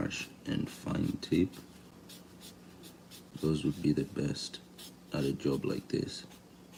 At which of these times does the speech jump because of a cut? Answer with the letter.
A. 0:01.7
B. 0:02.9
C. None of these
C